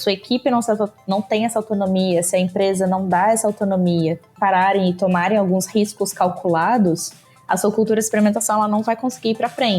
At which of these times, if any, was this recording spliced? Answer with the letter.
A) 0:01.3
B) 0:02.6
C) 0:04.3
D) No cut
C